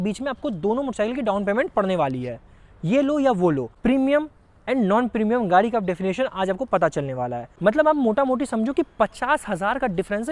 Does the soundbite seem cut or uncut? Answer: cut